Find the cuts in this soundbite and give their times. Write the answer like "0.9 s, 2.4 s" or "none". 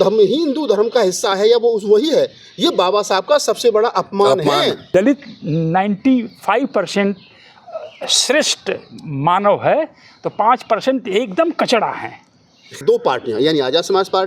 4.8 s, 12.7 s